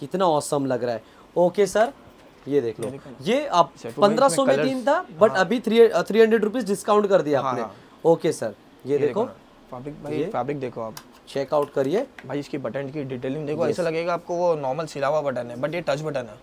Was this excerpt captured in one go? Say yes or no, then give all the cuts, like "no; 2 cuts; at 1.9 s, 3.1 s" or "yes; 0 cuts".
yes; 0 cuts